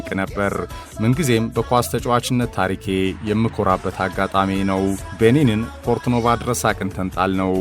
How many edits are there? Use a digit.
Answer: 1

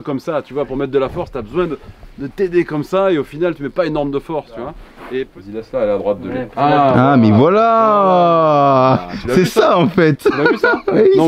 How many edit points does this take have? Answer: 1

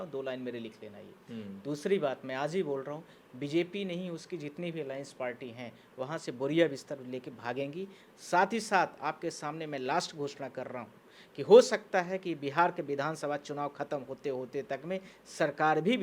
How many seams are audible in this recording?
0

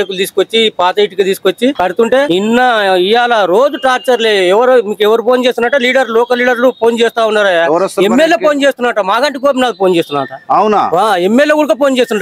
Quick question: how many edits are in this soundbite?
1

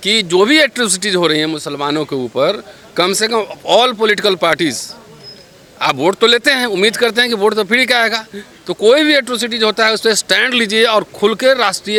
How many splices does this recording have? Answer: 0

